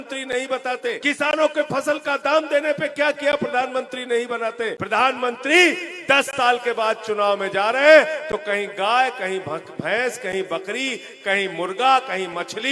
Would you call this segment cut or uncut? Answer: cut